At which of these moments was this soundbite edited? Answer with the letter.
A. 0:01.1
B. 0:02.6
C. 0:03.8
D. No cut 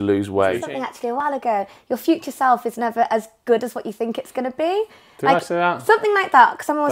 A